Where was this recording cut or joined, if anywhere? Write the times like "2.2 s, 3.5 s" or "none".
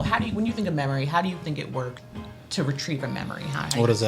2.0 s